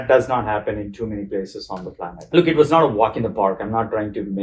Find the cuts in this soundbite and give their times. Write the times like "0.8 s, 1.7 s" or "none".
2.1 s